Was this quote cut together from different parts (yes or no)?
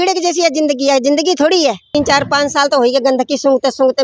yes